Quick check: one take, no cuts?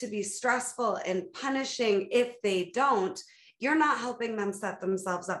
yes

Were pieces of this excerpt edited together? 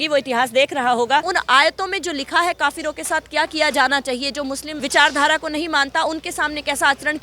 yes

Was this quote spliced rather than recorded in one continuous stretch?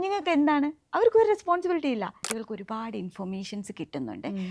yes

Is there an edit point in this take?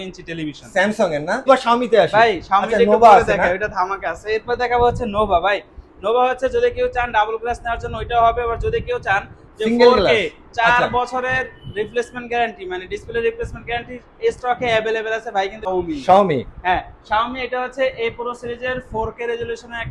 yes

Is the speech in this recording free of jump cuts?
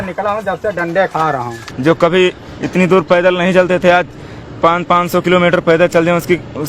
no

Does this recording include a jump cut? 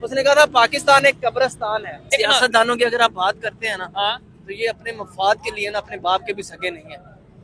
yes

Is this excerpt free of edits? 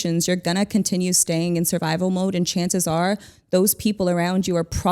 yes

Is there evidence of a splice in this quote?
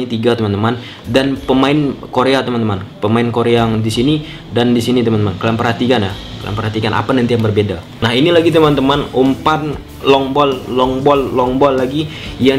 yes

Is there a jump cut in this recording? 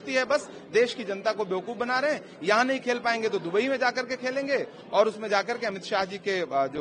no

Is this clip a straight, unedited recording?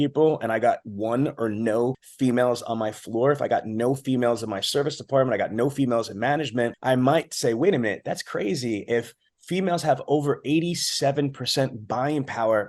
no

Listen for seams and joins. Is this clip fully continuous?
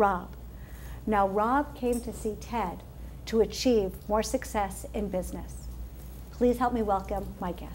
yes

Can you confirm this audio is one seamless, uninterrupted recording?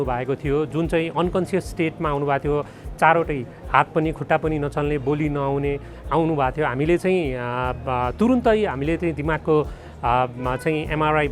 yes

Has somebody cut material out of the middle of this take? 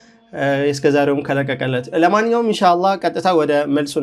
no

